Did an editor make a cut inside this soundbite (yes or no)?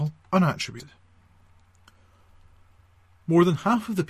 no